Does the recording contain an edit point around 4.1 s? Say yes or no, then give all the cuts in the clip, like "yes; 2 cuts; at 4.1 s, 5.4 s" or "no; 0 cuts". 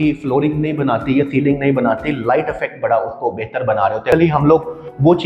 yes; 1 cut; at 4.1 s